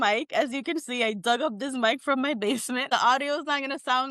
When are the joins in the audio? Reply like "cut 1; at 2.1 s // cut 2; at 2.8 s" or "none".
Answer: cut 1; at 2.9 s